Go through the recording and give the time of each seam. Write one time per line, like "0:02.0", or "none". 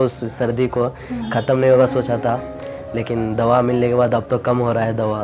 none